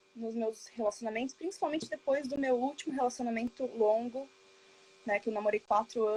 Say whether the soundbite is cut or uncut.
uncut